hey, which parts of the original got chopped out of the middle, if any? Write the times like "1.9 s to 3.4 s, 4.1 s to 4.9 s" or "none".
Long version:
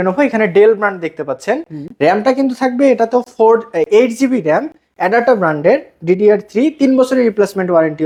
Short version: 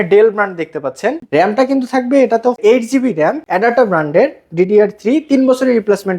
1.7 s to 1.9 s, 3.3 s to 3.9 s, 4.7 s to 4.9 s